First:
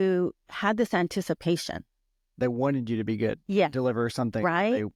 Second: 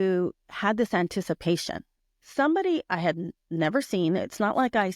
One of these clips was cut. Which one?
second; 1 cut; at 2.2 s

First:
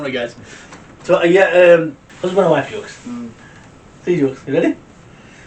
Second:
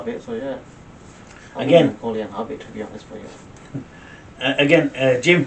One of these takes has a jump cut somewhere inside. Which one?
first; 1 cut; at 2.0 s

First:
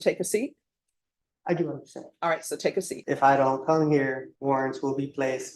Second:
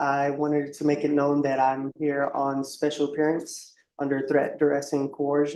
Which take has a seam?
first; 2 cuts; at 3.0 s, 4.3 s

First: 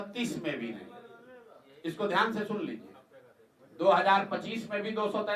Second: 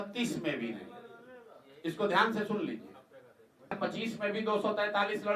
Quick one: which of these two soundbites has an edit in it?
second; 1 cut; at 3.8 s

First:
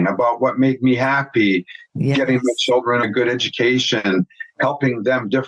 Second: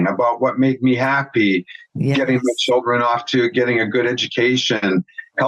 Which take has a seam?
first; 1 cut; at 3.0 s

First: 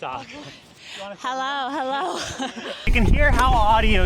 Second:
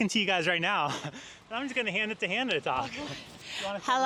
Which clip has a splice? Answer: first; 1 cut; at 2.9 s

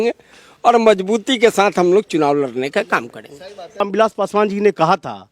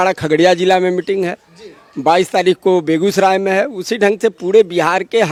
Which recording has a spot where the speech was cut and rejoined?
first; 1 cut; at 3.8 s

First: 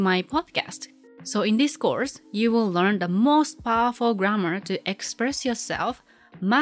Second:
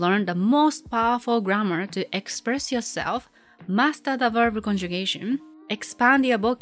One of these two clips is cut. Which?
first; 1 cut; at 0.9 s

